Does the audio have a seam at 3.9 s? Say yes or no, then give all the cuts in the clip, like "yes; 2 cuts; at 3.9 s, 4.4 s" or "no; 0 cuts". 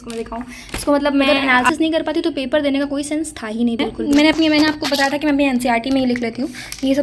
yes; 2 cuts; at 1.2 s, 3.9 s